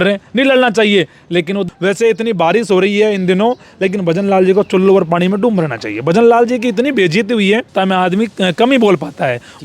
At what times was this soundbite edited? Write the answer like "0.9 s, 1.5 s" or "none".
1.6 s, 7.7 s

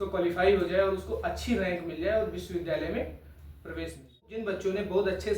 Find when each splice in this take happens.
4.4 s

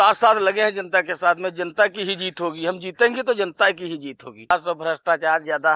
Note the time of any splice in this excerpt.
4.5 s

